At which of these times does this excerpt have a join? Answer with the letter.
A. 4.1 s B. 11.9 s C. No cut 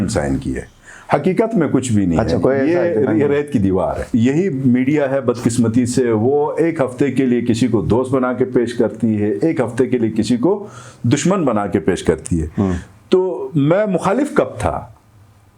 A